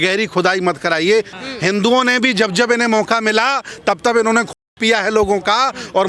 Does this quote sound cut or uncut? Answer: cut